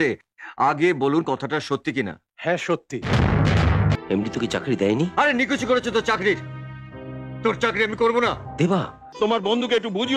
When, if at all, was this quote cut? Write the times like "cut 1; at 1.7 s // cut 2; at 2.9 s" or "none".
cut 1; at 3.9 s // cut 2; at 9.0 s